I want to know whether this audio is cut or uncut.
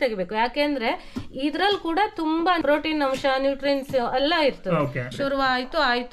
cut